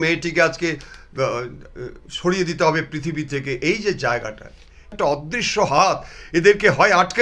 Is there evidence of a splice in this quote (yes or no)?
yes